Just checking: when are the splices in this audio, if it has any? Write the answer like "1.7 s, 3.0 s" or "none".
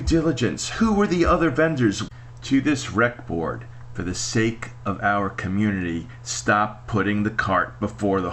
2.1 s